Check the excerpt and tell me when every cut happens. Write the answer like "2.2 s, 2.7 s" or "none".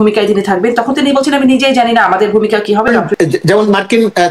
2.9 s